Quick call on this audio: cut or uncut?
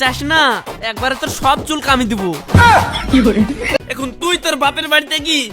cut